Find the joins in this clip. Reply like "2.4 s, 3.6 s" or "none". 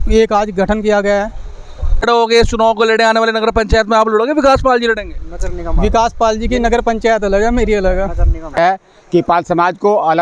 2.0 s, 8.6 s